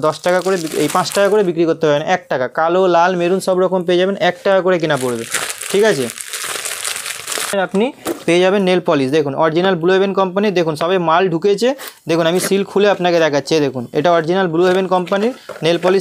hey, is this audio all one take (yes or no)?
yes